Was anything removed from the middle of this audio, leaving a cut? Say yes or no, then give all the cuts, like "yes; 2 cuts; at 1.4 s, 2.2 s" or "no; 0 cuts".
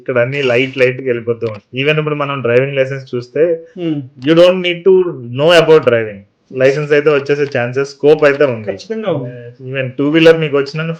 yes; 1 cut; at 1.7 s